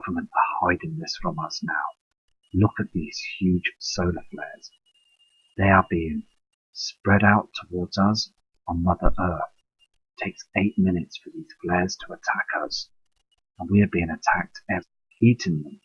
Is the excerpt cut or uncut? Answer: uncut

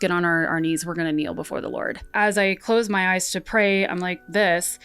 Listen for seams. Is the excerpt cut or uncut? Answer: cut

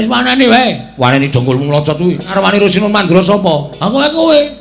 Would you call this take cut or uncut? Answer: cut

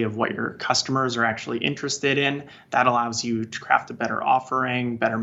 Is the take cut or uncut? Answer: uncut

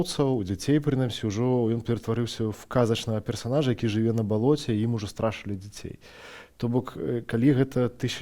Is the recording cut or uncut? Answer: uncut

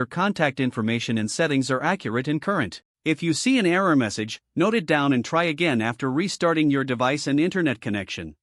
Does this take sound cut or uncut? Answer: cut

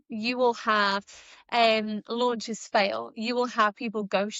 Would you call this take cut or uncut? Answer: uncut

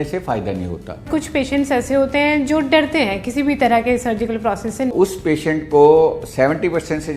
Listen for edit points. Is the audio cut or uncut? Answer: cut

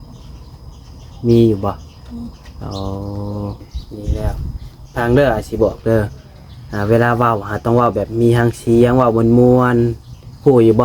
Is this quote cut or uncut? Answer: cut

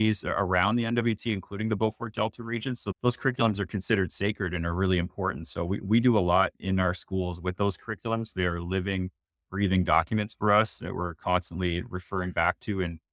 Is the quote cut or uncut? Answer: cut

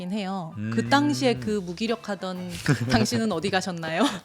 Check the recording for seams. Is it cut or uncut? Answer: uncut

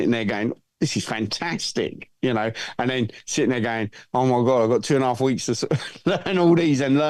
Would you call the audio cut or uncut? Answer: uncut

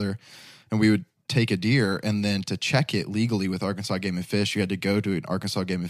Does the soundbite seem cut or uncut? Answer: uncut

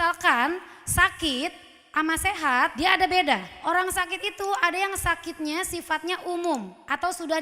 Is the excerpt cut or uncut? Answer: cut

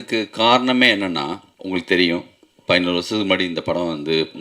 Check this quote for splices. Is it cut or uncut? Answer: cut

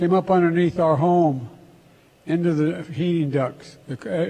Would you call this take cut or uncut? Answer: cut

